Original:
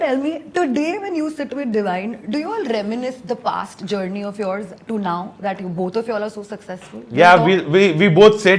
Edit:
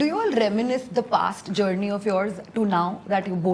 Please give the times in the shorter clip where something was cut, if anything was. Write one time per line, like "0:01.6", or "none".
none